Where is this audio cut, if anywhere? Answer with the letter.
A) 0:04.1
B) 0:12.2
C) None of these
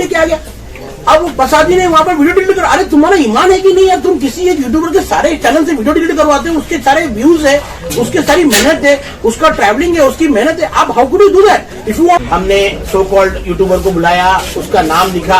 B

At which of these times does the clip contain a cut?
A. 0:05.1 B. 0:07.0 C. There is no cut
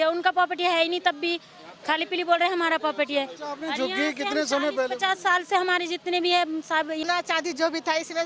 B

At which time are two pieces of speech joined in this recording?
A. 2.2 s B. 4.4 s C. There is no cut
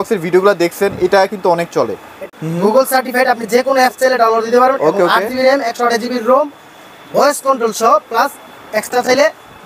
A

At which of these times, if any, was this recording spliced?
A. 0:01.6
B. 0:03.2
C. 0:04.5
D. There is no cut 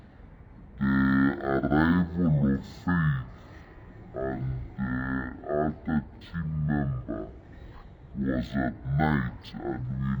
D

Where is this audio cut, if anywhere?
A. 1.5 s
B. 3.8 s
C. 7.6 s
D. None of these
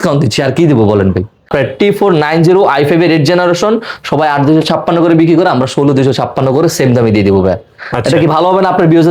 A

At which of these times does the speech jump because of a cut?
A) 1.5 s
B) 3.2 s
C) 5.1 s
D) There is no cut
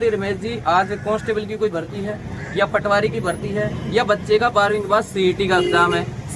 D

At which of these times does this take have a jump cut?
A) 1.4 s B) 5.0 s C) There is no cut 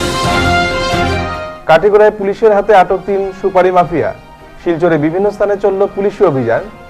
A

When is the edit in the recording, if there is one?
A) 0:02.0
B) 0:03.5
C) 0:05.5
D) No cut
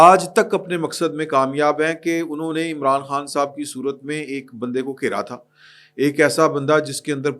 D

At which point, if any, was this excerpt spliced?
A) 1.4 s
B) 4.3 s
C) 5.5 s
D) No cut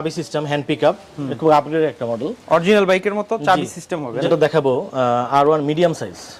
B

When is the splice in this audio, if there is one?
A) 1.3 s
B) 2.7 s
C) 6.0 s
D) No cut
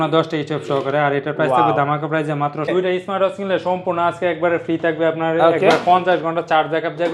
B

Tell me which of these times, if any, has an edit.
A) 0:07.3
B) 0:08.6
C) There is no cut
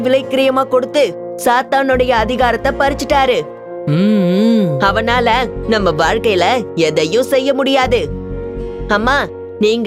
B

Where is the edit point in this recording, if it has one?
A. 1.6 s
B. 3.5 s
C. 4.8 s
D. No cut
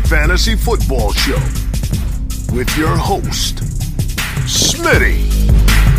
D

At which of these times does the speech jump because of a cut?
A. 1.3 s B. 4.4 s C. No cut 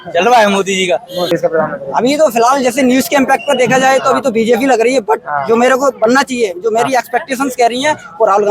A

